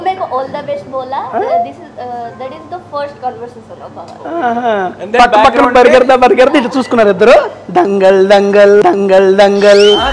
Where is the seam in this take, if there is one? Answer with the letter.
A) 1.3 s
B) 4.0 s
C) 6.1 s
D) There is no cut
D